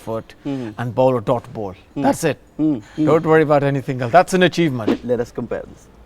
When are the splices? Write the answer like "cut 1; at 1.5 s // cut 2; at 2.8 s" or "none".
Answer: cut 1; at 4.9 s